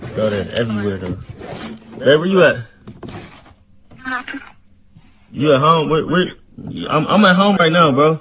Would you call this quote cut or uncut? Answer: uncut